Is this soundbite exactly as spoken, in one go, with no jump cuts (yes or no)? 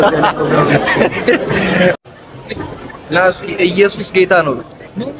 no